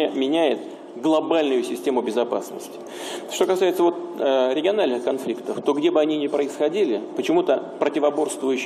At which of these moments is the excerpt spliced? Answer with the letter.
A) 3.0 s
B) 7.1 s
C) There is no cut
A